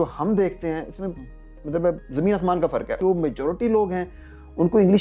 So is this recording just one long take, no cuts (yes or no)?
no